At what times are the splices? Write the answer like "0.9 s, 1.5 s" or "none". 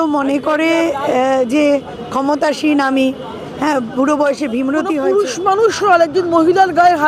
5.0 s

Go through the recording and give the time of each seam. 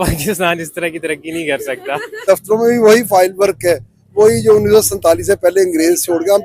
2.2 s

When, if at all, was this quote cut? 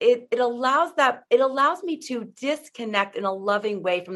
none

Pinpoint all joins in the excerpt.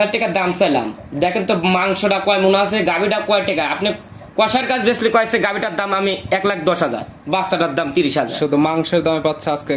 none

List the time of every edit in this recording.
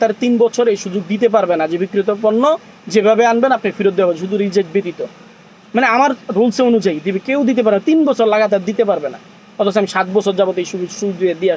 none

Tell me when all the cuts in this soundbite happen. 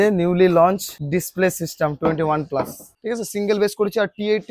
0.9 s, 2.8 s

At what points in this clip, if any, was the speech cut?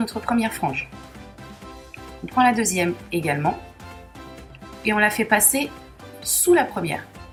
none

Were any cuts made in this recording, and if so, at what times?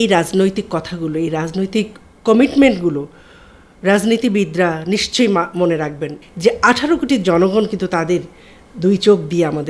6.2 s

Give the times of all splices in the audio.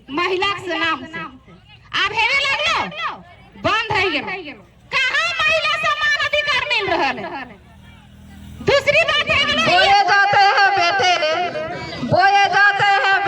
9.5 s

